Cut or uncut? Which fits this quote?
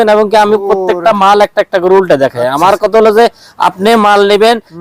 uncut